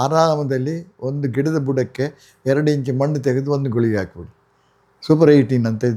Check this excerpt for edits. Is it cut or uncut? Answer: uncut